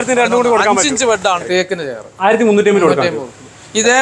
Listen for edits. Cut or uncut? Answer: cut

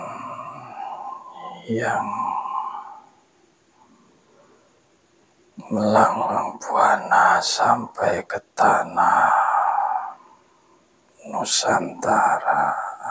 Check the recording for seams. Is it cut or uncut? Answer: uncut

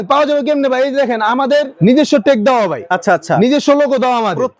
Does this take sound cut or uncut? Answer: cut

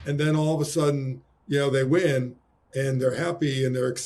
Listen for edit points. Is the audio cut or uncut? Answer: uncut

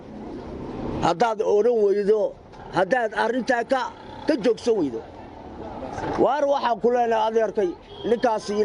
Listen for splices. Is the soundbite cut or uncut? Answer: uncut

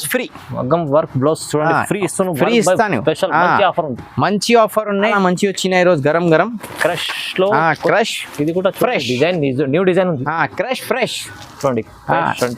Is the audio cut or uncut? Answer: cut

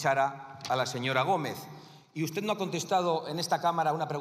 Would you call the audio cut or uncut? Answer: uncut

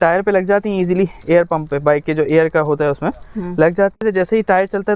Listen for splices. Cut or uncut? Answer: cut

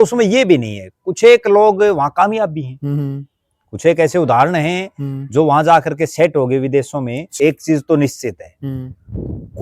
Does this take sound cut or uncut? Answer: cut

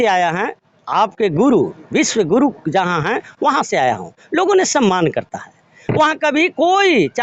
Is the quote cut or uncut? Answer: uncut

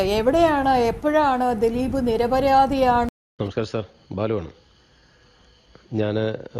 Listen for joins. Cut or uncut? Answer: cut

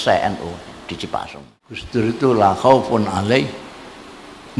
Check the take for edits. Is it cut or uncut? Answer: cut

